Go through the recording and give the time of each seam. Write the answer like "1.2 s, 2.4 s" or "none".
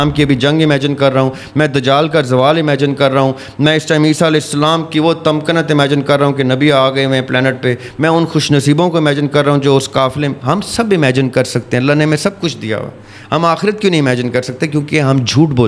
none